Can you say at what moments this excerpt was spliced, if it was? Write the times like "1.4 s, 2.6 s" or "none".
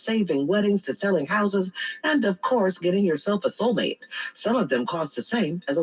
none